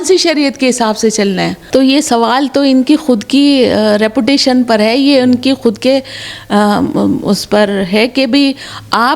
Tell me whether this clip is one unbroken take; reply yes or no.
no